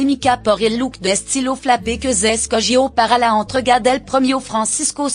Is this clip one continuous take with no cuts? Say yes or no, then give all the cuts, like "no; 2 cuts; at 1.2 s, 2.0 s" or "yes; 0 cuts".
yes; 0 cuts